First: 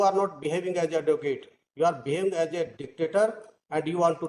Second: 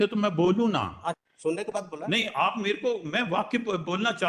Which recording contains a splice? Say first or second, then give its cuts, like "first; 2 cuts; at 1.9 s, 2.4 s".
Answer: second; 1 cut; at 1.2 s